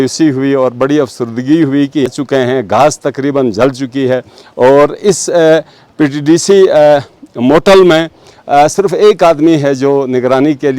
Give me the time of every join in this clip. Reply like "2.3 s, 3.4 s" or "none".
2.1 s